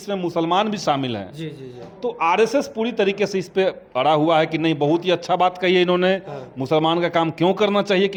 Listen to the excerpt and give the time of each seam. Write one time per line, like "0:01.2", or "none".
none